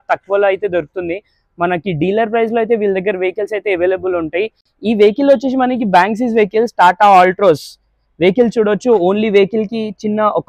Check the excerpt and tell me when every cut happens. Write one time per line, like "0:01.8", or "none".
none